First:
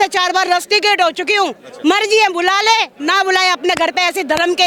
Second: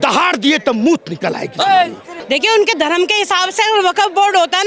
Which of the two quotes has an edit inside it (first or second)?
second